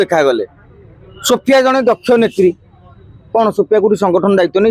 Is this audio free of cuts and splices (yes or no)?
yes